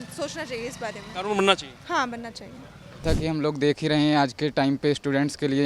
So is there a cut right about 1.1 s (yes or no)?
no